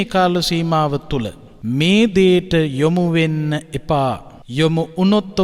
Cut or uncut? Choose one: cut